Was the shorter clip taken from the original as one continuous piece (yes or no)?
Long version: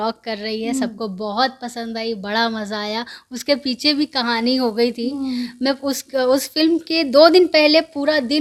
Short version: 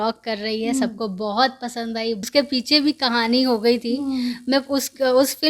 no